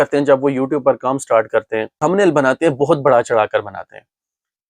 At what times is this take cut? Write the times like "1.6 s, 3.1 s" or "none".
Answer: 2.0 s